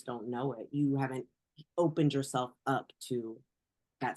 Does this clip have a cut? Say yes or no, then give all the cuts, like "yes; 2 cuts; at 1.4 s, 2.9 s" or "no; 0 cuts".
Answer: no; 0 cuts